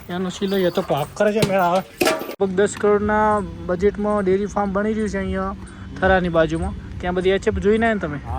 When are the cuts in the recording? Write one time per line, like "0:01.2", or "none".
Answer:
0:02.4